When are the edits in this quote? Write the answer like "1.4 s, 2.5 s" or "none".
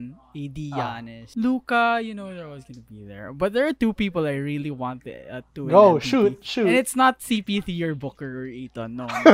1.1 s